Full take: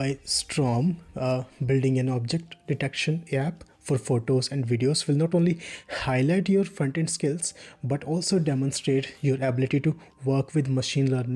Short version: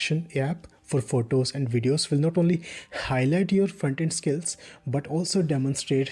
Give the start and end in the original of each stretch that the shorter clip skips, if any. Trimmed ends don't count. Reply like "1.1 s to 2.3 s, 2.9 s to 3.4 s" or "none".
none